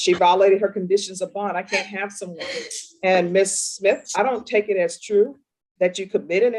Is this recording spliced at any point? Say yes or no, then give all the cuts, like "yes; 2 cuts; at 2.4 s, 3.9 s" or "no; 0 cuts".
no; 0 cuts